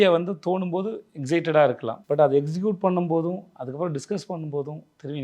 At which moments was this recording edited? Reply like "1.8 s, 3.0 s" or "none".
1.9 s